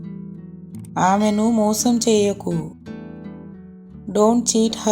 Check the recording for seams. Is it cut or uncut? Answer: cut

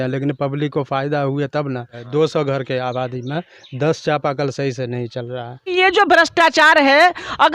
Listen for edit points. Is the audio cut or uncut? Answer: cut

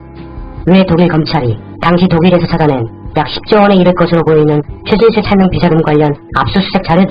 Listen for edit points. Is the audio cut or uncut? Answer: uncut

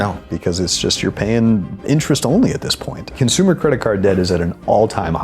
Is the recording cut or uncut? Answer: cut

